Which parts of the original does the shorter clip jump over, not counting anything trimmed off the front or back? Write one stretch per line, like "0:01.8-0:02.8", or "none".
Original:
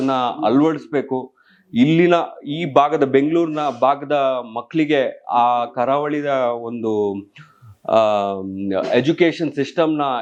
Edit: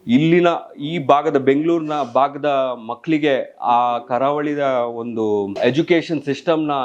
0:07.2-0:08.9